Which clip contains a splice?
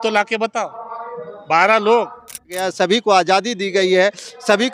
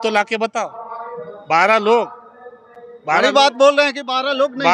first; 1 cut; at 2.6 s

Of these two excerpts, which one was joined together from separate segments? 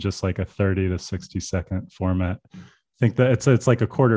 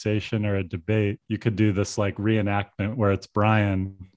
second; 1 cut; at 1.2 s

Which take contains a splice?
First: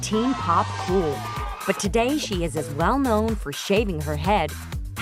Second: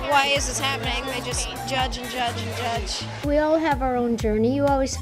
first; 1 cut; at 1.2 s

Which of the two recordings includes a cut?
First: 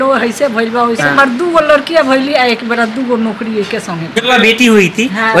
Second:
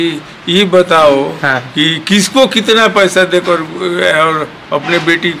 first; 2 cuts; at 1.1 s, 4.2 s

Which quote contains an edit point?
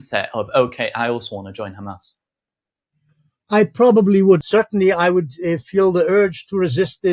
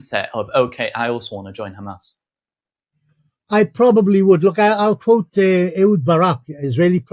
first; 1 cut; at 4.4 s

